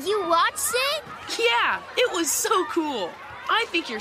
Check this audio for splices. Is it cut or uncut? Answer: cut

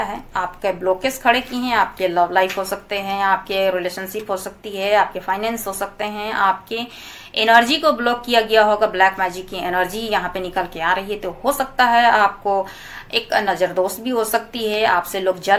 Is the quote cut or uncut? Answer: uncut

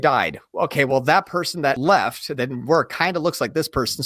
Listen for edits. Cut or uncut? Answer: cut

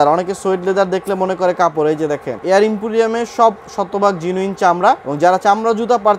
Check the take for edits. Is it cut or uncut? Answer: cut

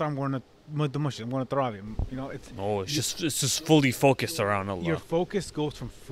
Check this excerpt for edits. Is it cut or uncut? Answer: uncut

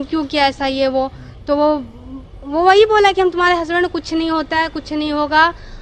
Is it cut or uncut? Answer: uncut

